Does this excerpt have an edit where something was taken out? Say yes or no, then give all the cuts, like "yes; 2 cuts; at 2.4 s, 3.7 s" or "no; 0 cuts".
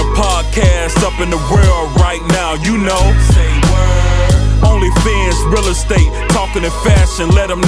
no; 0 cuts